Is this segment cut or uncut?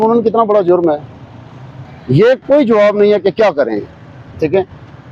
uncut